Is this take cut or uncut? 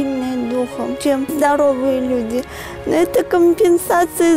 cut